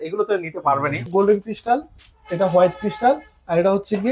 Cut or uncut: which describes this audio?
cut